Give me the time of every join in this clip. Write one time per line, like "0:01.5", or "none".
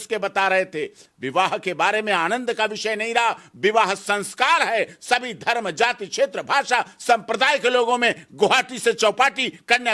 none

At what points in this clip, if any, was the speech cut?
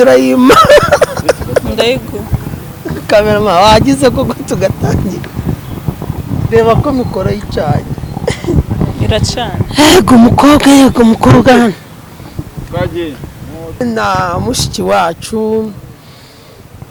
none

